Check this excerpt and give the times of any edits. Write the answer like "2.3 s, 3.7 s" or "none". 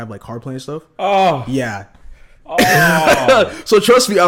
none